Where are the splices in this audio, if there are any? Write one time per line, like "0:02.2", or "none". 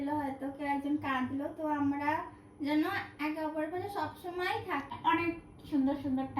0:04.9